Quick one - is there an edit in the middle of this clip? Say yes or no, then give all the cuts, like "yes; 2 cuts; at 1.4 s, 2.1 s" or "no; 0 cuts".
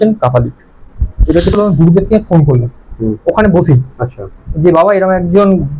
yes; 1 cut; at 1.5 s